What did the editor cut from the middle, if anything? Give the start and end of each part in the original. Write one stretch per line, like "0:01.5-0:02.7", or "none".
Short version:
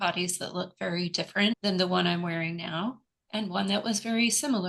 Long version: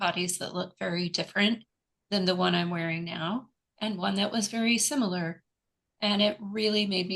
0:01.6-0:02.1